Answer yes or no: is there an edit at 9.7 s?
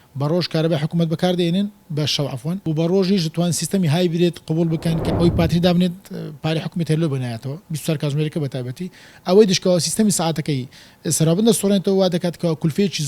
no